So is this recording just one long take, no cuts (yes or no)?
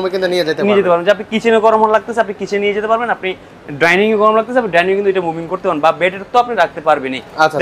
yes